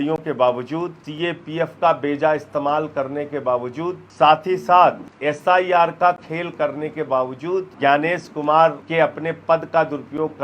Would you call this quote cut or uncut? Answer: cut